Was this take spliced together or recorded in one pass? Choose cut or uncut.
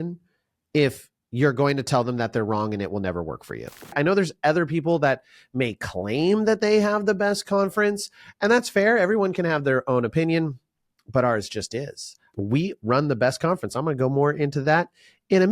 cut